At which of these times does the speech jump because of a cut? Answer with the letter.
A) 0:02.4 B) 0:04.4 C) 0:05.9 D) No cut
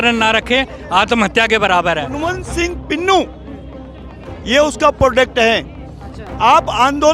A